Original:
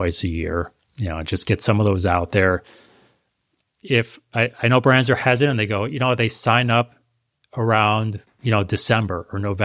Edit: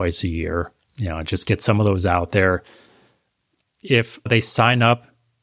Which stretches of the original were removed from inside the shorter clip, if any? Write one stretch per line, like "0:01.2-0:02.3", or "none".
0:04.3-0:06.2